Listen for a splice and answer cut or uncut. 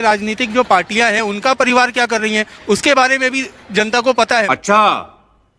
cut